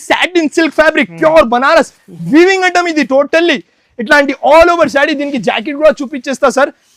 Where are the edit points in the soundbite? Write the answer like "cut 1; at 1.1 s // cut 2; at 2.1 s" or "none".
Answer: none